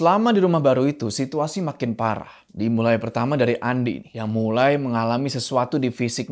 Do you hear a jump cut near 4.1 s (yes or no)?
yes